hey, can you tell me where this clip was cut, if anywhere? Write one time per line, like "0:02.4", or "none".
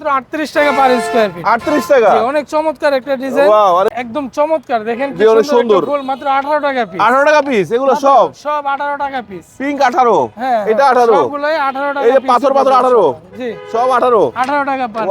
0:03.9